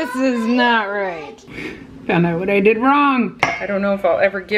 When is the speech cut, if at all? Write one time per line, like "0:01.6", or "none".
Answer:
0:01.5
0:03.4